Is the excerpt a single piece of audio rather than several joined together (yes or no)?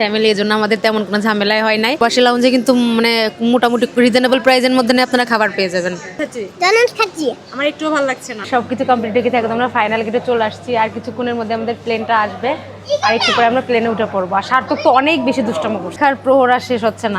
no